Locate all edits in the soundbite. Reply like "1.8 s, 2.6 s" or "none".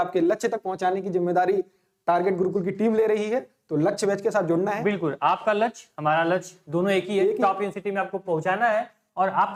none